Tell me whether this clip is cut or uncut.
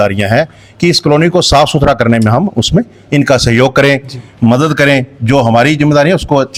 uncut